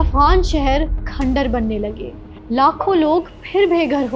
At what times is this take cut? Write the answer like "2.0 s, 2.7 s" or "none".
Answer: none